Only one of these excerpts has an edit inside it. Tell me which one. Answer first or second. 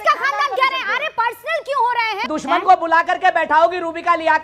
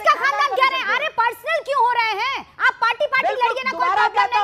first